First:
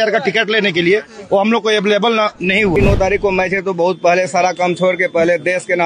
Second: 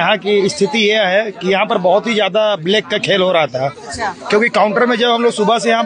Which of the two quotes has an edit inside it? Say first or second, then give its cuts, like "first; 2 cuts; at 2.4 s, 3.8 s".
first; 1 cut; at 2.8 s